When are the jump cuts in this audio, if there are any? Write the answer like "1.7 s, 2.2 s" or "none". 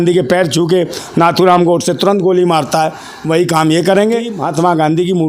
4.4 s

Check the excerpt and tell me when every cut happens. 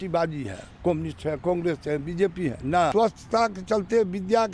2.9 s

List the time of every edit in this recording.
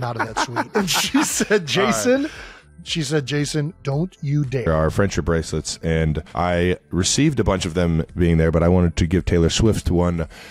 none

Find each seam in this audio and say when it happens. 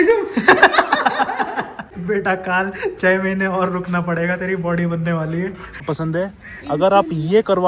2.0 s, 5.8 s

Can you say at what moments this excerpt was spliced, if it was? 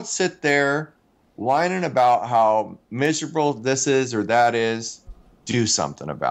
none

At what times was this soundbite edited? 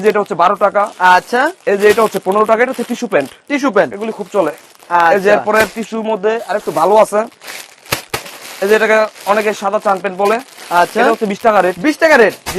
none

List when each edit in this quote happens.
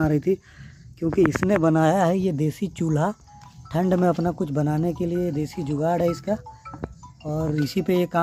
none

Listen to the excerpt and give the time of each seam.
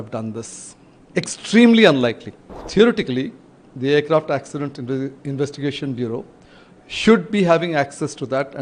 2.7 s

